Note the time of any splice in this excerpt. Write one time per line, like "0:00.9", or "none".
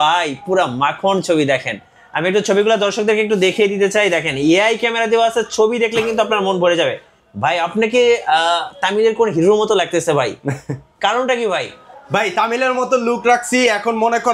none